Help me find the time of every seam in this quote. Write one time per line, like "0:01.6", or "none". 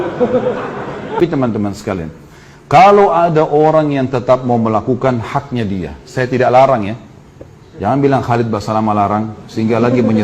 0:01.2